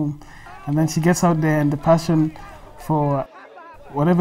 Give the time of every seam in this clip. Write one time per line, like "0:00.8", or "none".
0:03.3